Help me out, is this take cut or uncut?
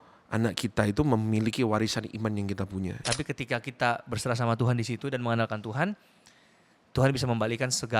cut